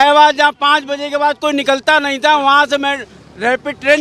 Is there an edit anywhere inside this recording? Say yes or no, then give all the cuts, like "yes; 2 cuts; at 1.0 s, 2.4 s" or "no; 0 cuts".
no; 0 cuts